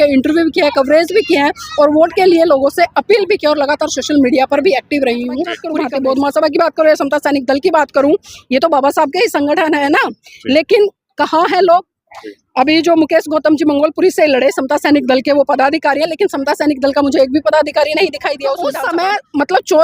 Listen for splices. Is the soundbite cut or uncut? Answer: cut